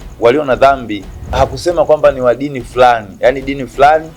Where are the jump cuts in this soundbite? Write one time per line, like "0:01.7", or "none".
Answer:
0:01.4